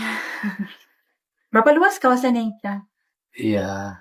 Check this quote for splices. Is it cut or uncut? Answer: uncut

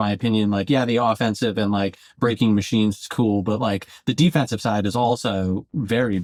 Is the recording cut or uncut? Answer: uncut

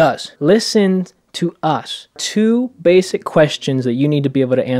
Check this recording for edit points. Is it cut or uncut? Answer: cut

